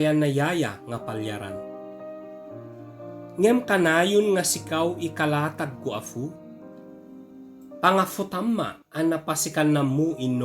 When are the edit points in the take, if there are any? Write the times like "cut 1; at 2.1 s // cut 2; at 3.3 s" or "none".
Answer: cut 1; at 1.5 s // cut 2; at 3.3 s